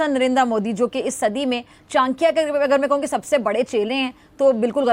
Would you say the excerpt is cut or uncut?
uncut